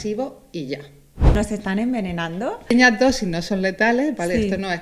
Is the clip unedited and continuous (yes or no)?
no